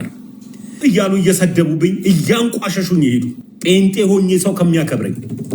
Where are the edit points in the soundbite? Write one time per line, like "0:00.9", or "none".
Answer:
0:00.8
0:03.4